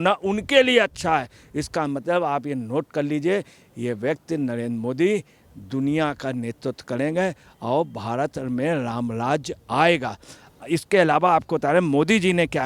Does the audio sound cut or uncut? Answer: uncut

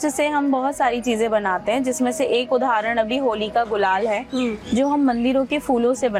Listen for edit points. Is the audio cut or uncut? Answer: uncut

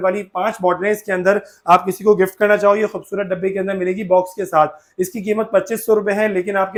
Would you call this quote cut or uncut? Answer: uncut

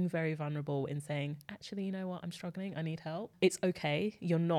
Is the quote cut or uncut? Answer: uncut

